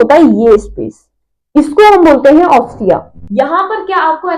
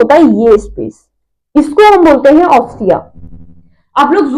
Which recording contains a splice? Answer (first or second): first